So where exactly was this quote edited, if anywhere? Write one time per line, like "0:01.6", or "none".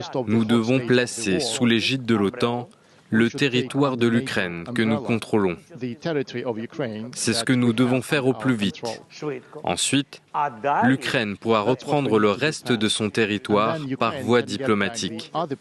0:06.3